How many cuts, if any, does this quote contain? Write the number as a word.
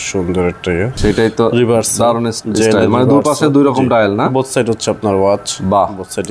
two